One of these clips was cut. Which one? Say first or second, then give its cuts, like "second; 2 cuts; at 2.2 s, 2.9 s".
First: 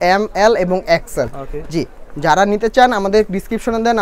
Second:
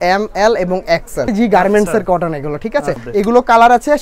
second; 2 cuts; at 1.3 s, 3.0 s